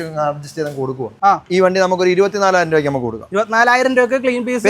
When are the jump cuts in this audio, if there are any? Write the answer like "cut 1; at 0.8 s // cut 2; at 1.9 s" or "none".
cut 1; at 1.1 s